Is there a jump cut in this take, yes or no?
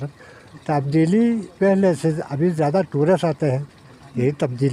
no